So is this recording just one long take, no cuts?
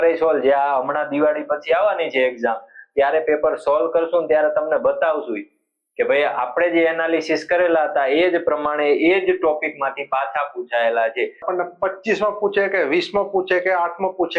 no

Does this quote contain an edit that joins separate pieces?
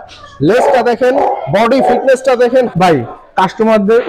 yes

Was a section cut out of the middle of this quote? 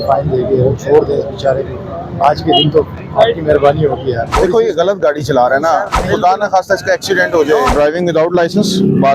yes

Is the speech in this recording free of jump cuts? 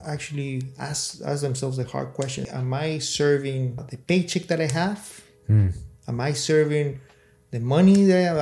no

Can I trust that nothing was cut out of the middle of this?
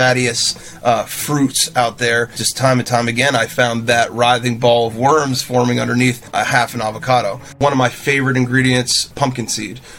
no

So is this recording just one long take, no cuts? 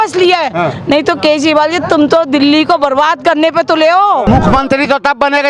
no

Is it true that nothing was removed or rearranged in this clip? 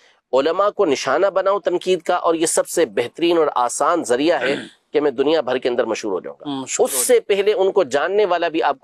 yes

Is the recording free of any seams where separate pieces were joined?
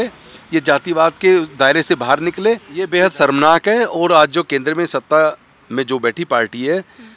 no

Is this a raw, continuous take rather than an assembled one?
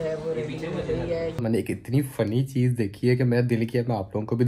no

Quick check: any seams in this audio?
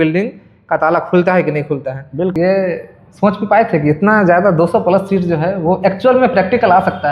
yes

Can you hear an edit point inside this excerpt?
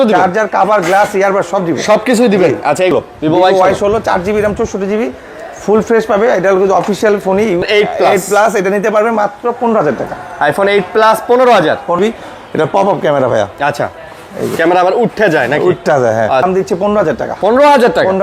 yes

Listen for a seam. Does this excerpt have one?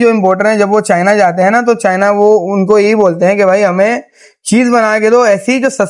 no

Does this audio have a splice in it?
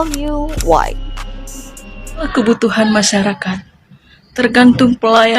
yes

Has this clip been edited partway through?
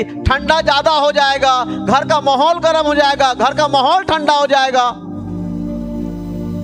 no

